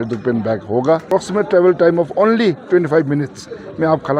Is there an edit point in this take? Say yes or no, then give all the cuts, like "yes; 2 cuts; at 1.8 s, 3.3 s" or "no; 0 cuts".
yes; 1 cut; at 1.1 s